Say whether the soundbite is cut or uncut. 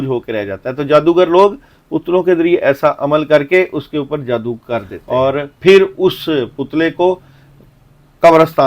cut